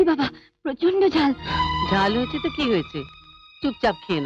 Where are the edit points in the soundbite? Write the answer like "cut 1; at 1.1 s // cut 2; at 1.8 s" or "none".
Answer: cut 1; at 1.5 s